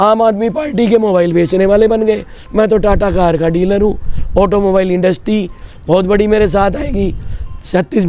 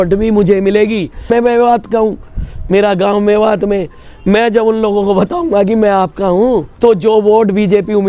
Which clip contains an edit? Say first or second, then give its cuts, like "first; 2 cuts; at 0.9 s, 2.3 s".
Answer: second; 2 cuts; at 1.3 s, 6.7 s